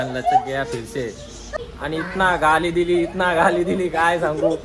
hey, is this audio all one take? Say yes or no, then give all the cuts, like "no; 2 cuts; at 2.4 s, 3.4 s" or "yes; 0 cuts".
no; 1 cut; at 1.4 s